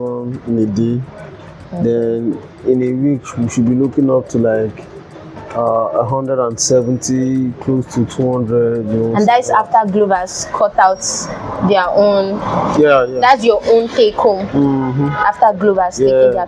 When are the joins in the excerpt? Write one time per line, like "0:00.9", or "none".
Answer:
none